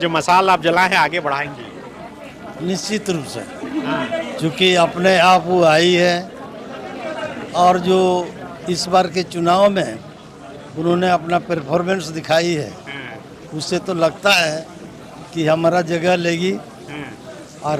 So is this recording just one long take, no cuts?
yes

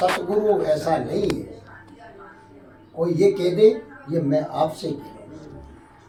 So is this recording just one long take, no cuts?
yes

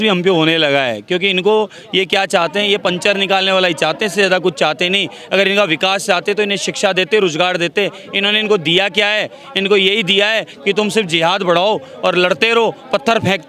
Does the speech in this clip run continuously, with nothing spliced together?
yes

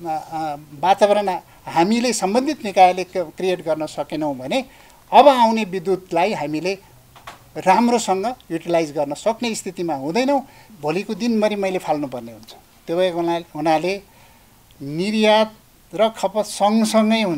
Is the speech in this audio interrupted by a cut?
yes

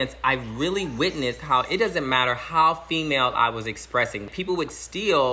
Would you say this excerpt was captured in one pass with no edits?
no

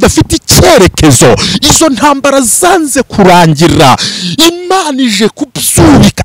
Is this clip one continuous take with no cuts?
yes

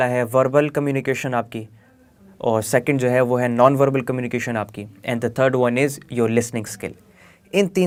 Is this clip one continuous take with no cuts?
yes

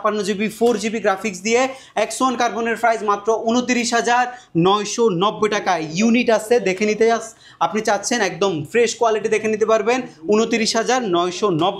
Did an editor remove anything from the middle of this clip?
no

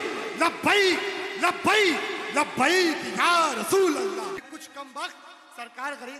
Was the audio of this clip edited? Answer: yes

